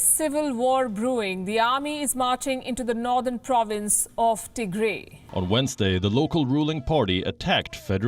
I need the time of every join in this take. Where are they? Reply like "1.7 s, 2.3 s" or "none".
none